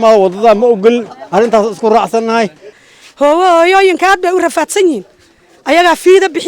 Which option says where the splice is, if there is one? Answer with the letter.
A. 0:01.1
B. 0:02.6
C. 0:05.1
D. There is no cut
B